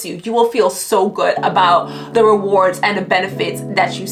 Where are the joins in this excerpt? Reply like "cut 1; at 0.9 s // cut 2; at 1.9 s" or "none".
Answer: none